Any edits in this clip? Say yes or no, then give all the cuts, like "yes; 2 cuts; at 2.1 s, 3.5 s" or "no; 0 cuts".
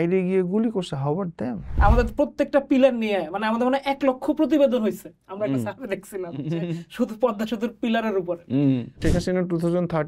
yes; 2 cuts; at 1.6 s, 8.9 s